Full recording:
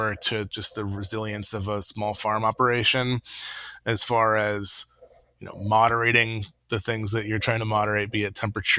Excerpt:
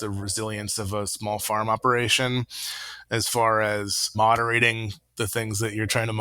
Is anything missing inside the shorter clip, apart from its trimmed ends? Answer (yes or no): yes